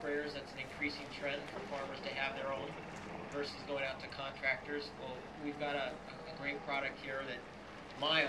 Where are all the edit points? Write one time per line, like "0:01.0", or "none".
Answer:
0:00.9